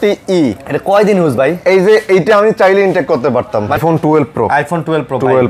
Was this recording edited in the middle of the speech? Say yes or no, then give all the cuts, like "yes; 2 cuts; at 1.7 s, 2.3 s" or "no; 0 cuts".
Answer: yes; 1 cut; at 3.8 s